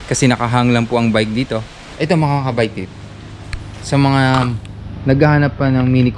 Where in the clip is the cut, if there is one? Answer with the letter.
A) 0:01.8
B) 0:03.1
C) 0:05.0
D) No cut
A